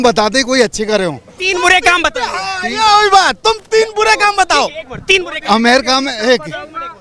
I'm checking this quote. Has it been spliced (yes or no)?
no